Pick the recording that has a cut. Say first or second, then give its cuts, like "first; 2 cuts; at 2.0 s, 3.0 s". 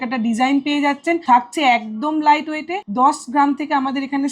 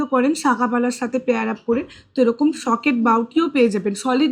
first; 2 cuts; at 1.2 s, 2.8 s